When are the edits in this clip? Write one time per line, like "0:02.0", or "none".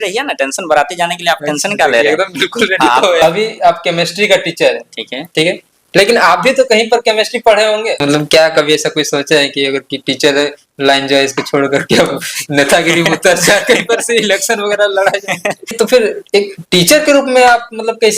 0:03.2
0:08.0
0:15.7